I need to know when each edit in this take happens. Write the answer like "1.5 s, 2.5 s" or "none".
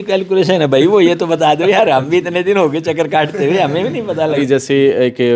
4.4 s